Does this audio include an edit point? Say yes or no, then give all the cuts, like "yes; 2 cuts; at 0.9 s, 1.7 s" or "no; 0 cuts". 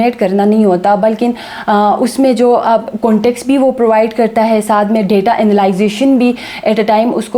no; 0 cuts